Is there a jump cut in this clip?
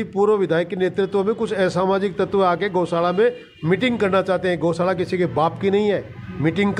no; 0 cuts

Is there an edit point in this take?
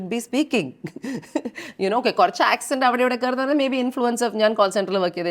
no; 0 cuts

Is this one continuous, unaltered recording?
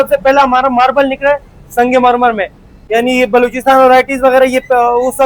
yes; 0 cuts

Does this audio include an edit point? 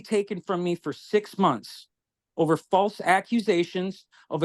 no; 0 cuts

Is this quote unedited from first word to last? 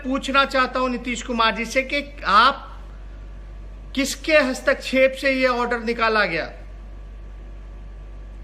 yes; 0 cuts

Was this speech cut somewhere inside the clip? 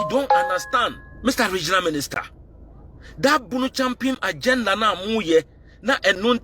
yes; 1 cut; at 1.1 s

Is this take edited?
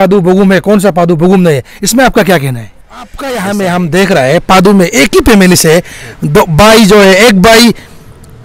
yes; 1 cut; at 3.2 s

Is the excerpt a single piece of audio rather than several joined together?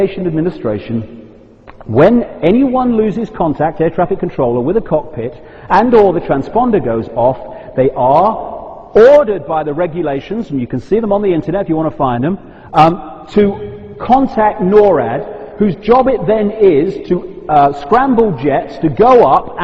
no; 1 cut; at 13.2 s

